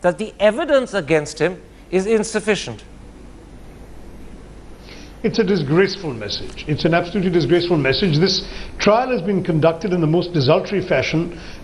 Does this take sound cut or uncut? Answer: cut